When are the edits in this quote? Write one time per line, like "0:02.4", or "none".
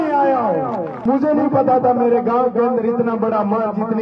0:00.9

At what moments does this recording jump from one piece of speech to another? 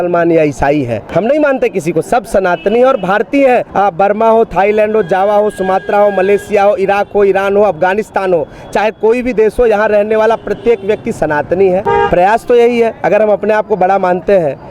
0:01.0
0:03.7
0:11.8

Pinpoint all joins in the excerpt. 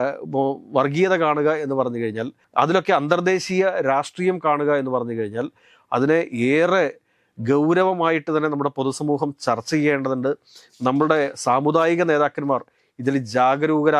none

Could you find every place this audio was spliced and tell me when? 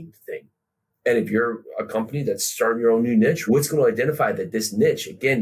0:03.4

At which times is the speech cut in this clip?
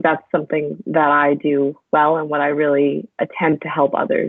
0:03.1

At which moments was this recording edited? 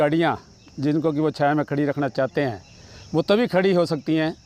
none

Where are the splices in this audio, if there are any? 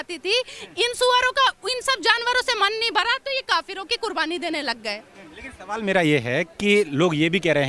none

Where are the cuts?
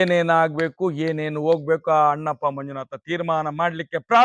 none

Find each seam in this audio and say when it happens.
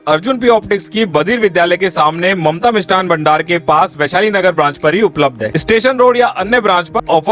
0:05.5

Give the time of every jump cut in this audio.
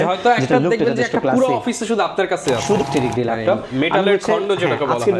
0:02.8

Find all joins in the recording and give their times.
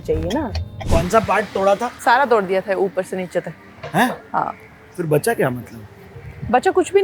0:00.9
0:01.9

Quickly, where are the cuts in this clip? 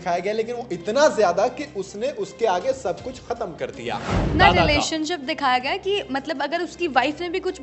0:04.3

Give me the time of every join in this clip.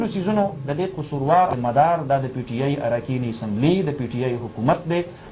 0:01.5

